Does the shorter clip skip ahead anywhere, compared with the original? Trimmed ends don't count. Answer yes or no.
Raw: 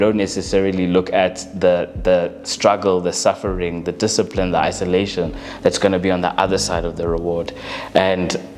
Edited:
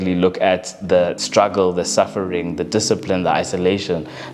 yes